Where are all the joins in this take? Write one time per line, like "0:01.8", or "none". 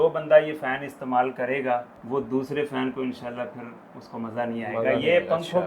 0:02.0